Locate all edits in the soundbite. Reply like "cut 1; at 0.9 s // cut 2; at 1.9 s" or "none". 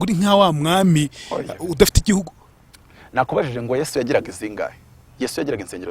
none